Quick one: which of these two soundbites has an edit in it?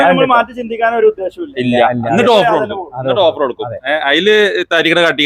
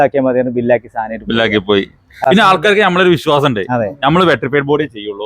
second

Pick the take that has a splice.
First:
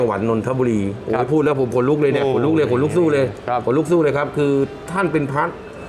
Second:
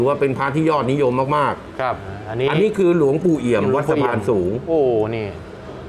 second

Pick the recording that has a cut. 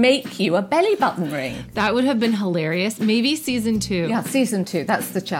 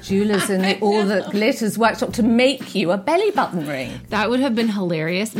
first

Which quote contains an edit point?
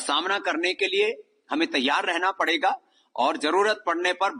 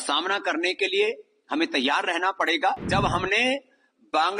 second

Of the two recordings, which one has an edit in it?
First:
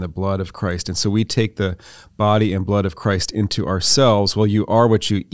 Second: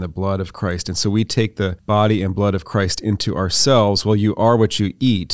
second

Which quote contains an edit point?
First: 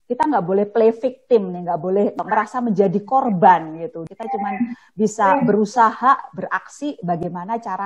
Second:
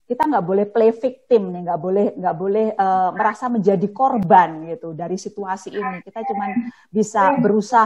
first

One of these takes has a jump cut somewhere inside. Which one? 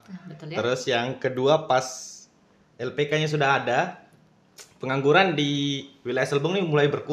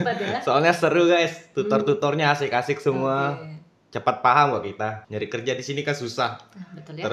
second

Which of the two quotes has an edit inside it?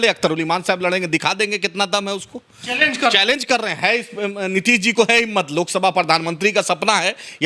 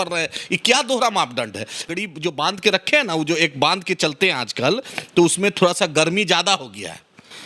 second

